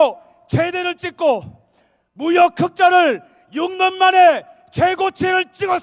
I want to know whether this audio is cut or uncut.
uncut